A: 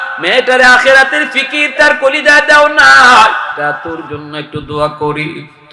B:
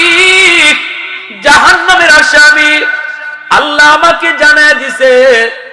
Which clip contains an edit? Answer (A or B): A